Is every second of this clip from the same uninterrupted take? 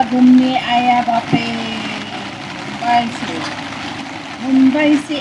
yes; 0 cuts

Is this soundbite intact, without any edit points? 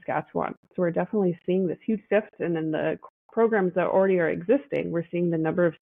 yes; 0 cuts

